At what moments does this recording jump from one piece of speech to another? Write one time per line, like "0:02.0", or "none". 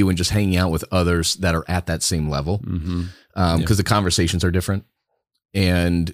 none